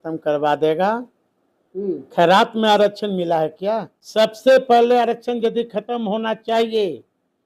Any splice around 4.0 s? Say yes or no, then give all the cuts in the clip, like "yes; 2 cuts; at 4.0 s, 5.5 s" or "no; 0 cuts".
yes; 1 cut; at 4.0 s